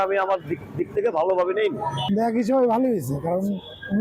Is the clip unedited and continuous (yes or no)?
no